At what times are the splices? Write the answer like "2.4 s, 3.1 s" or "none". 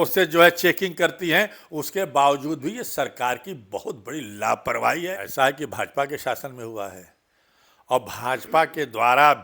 5.2 s

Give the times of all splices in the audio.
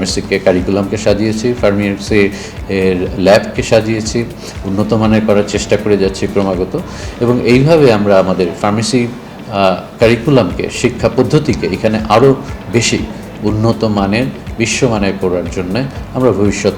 none

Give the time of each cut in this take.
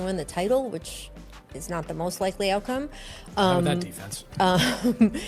none

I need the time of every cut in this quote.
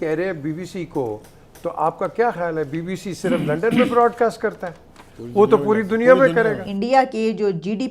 6.7 s

